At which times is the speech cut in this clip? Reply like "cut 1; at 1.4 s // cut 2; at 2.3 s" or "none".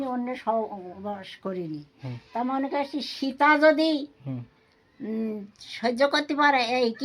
none